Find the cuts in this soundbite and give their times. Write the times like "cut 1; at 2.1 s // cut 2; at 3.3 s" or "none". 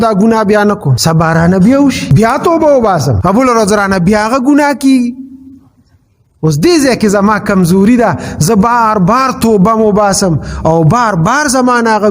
cut 1; at 0.9 s // cut 2; at 2.0 s // cut 3; at 3.1 s